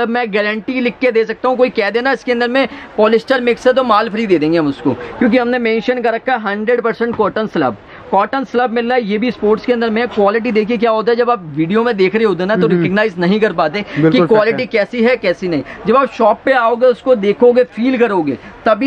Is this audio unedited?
yes; 0 cuts

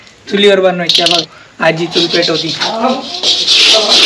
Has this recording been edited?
yes; 1 cut; at 1.2 s

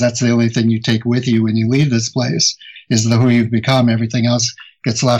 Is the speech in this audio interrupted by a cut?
no; 0 cuts

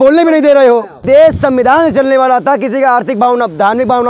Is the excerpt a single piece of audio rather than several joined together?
yes; 0 cuts

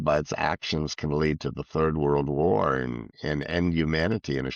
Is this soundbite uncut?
yes; 0 cuts

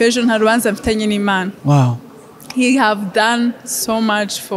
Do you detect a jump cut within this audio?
no; 0 cuts

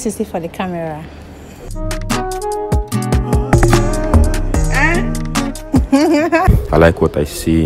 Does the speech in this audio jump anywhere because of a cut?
yes; 1 cut; at 6.5 s

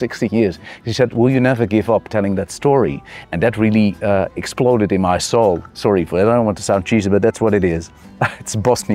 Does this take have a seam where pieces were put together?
no; 0 cuts

